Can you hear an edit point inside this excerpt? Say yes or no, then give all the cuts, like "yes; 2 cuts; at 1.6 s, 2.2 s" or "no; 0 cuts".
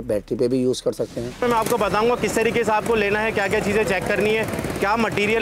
yes; 1 cut; at 1.4 s